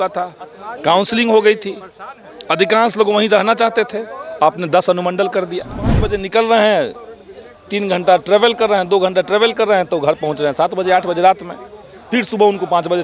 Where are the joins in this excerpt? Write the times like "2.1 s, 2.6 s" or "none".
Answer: 6.1 s